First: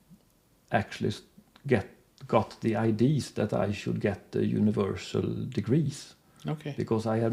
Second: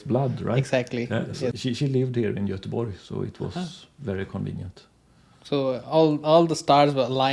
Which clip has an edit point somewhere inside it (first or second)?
second